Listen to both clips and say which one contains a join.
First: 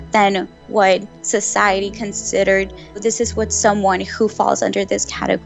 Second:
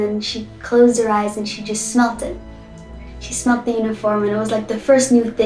first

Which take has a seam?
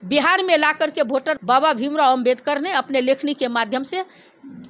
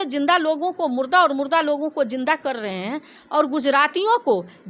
first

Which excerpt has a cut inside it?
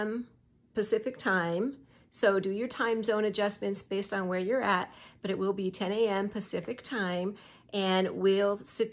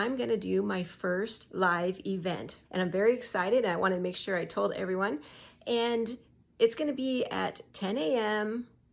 second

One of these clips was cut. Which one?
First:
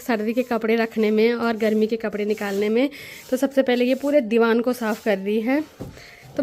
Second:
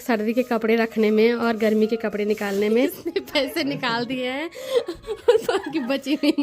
second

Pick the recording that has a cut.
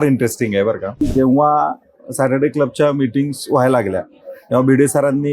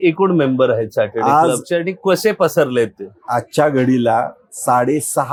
first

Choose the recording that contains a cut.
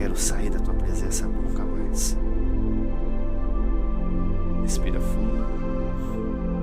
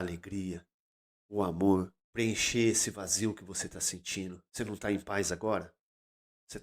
second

